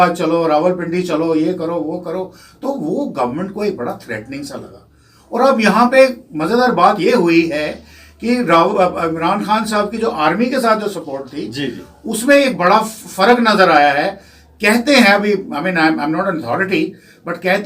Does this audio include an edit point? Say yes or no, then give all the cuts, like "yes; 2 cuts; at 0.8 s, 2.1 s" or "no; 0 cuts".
no; 0 cuts